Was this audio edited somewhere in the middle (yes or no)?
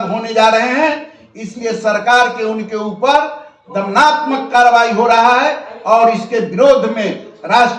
no